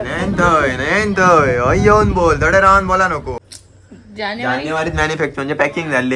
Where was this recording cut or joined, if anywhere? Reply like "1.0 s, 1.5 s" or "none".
3.4 s